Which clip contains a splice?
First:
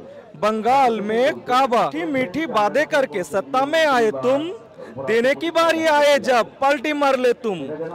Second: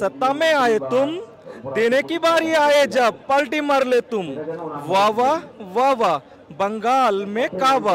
first; 1 cut; at 2.0 s

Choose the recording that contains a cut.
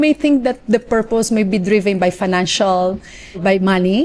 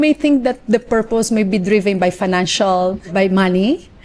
second; 1 cut; at 3.0 s

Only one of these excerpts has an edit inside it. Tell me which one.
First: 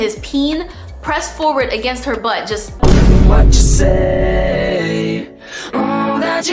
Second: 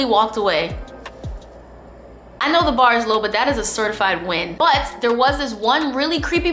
second; 1 cut; at 4.5 s

